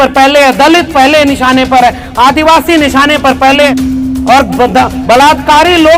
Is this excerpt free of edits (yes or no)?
no